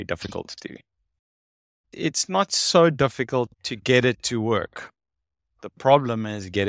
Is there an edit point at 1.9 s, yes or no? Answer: yes